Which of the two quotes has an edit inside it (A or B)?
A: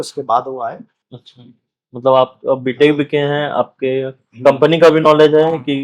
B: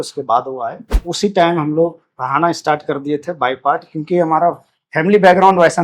B